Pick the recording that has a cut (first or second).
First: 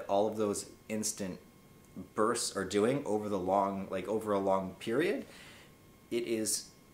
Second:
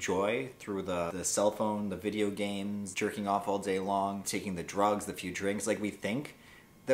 second